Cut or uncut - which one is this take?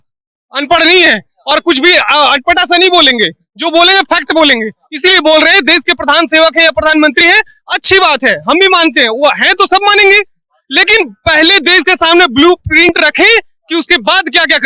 uncut